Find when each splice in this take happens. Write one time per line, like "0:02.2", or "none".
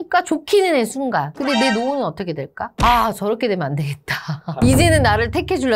0:01.3
0:02.8